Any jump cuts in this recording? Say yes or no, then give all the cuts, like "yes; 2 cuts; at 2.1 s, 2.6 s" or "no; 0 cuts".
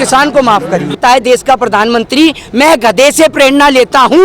yes; 1 cut; at 1.0 s